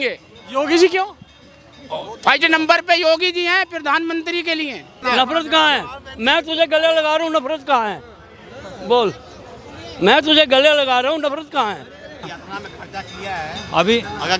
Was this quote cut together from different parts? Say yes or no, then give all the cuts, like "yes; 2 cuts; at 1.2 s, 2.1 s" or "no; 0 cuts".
yes; 2 cuts; at 5.0 s, 12.3 s